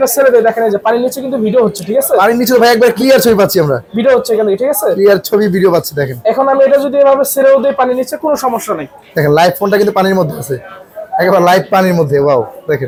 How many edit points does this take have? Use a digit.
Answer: 0